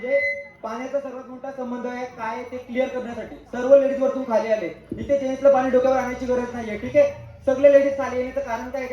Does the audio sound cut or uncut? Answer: uncut